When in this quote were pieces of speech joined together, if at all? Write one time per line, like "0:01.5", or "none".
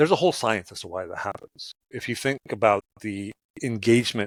none